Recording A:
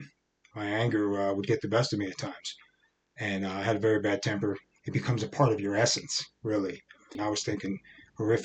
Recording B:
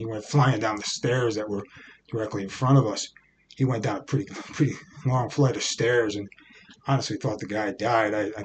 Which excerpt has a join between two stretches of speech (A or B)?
A